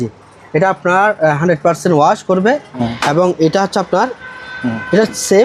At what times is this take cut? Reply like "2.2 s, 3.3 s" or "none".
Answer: 2.8 s